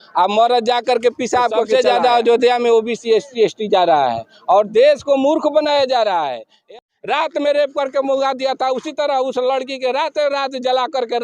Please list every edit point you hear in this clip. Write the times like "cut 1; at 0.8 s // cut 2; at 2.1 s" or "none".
cut 1; at 1.7 s // cut 2; at 6.7 s

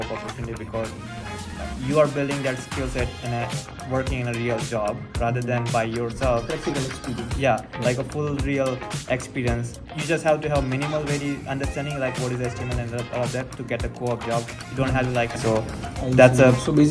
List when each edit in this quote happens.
cut 1; at 15.4 s

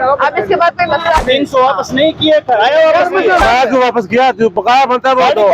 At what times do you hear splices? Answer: cut 1; at 1.2 s // cut 2; at 3.4 s

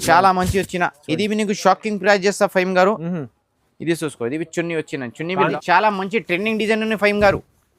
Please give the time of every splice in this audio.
cut 1; at 5.5 s

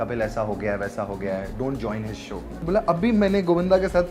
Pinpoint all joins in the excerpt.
cut 1; at 2.6 s

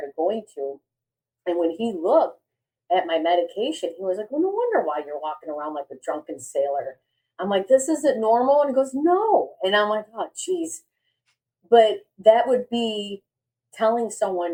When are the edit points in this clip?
none

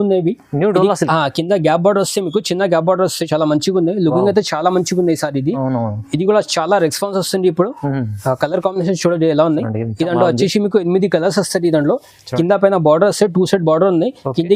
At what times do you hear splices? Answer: none

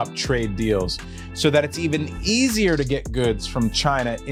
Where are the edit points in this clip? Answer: none

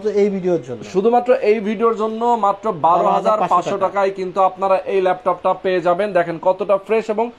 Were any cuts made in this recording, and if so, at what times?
none

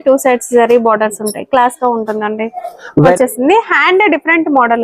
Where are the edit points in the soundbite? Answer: cut 1; at 3.1 s

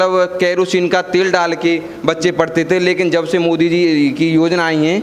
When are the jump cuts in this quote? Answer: none

